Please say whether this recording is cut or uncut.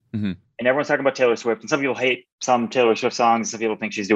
cut